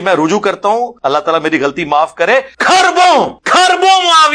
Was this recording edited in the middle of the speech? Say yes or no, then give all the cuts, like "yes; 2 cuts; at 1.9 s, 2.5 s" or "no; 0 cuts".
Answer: yes; 3 cuts; at 0.9 s, 2.5 s, 3.4 s